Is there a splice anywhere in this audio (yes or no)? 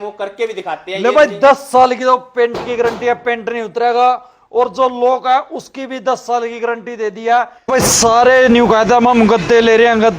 yes